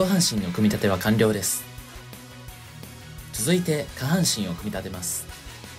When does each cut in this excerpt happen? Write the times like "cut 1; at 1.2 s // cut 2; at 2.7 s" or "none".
cut 1; at 1.6 s // cut 2; at 3.4 s // cut 3; at 5.0 s